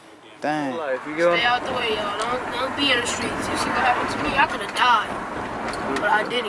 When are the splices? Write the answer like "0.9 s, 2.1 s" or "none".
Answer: 1.0 s